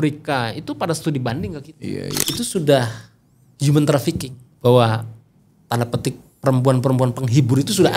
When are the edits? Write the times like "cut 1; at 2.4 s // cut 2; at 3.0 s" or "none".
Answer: cut 1; at 2.2 s